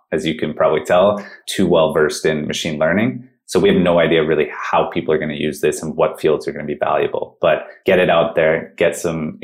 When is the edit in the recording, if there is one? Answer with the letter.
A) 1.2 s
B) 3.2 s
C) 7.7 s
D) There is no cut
C